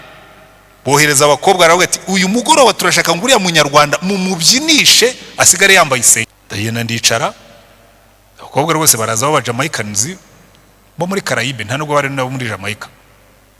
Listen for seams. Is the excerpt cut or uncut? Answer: cut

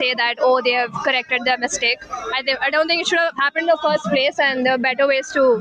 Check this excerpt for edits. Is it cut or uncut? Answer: uncut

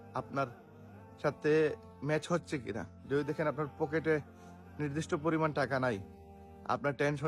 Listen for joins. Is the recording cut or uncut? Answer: uncut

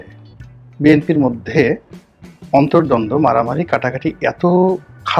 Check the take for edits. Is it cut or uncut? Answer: uncut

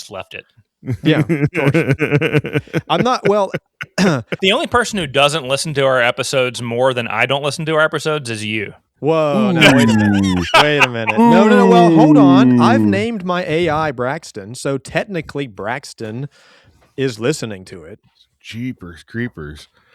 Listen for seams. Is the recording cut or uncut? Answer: cut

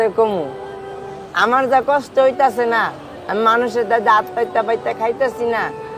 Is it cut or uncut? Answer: uncut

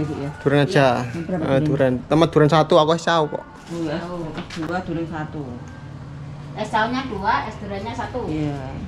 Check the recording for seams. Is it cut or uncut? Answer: uncut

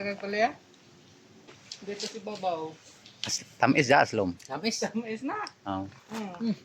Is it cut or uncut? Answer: cut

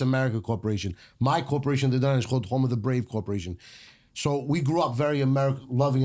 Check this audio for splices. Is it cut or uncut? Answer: uncut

